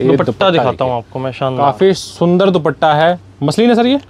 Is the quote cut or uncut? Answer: uncut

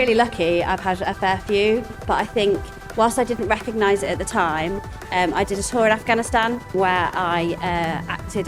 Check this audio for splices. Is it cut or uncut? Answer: cut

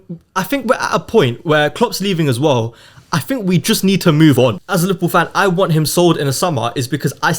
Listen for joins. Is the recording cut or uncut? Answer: cut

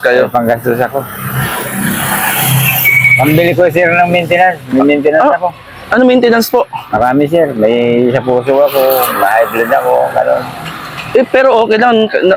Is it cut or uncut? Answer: uncut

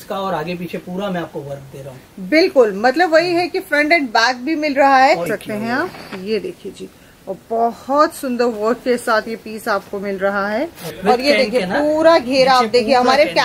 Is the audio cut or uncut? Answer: cut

